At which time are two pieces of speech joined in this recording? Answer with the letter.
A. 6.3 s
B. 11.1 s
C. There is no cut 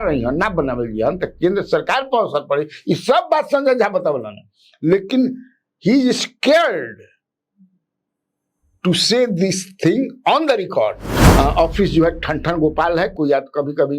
B